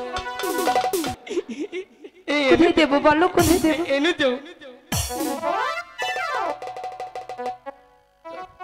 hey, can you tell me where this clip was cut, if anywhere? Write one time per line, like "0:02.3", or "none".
0:01.2